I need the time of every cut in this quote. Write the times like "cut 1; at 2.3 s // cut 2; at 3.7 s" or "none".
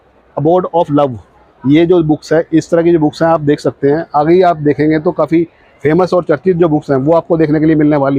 none